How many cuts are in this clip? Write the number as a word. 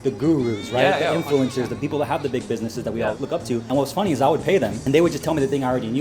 three